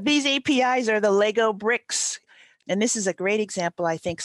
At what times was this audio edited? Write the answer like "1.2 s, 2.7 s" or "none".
2.2 s